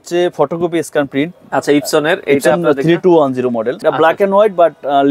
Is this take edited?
yes; 1 cut; at 3.7 s

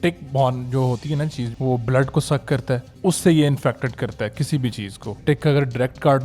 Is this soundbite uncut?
no; 3 cuts; at 1.5 s, 2.9 s, 5.2 s

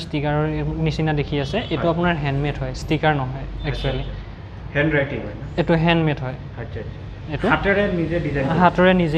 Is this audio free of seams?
yes; 0 cuts

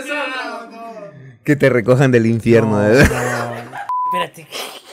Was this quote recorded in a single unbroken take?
no; 1 cut; at 4.0 s

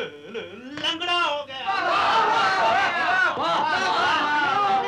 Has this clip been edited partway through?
no; 0 cuts

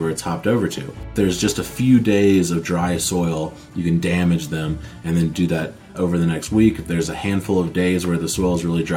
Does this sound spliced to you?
yes; 2 cuts; at 1.1 s, 5.9 s

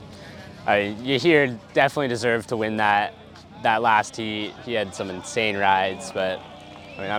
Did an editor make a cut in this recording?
no; 0 cuts

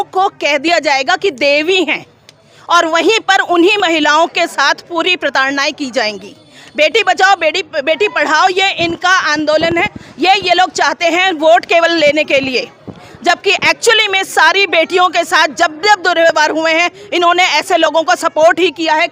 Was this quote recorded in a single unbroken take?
yes; 0 cuts

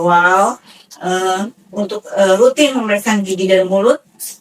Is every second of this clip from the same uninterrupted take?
yes; 0 cuts

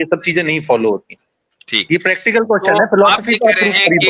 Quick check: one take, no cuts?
yes; 0 cuts

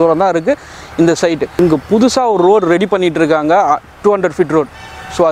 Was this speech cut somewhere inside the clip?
yes; 1 cut; at 1.6 s

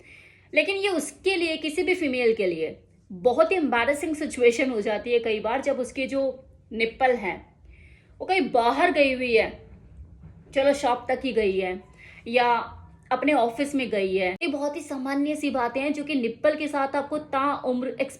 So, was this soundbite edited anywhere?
yes; 1 cut; at 14.4 s

